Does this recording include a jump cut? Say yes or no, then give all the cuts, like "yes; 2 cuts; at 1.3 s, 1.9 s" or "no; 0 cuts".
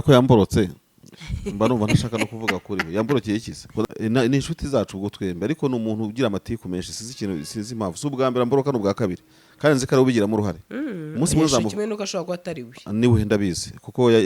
yes; 1 cut; at 3.8 s